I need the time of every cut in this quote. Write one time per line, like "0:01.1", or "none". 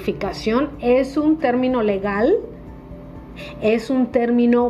none